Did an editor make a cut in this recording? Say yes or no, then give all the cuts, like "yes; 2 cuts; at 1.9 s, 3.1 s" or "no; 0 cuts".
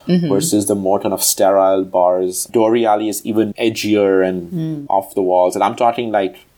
yes; 1 cut; at 2.5 s